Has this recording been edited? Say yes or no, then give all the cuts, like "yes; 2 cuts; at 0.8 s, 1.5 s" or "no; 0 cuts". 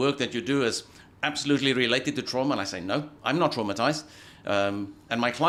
no; 0 cuts